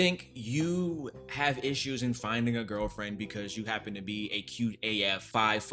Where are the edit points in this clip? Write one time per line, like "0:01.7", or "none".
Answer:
none